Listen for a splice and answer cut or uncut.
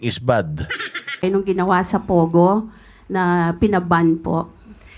cut